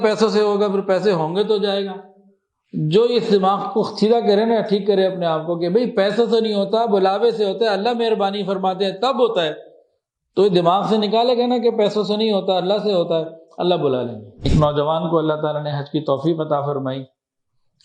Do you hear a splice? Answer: yes; 1 cut; at 14.3 s

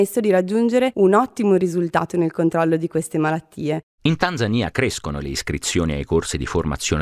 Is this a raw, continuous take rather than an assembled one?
no; 2 cuts; at 0.9 s, 3.9 s

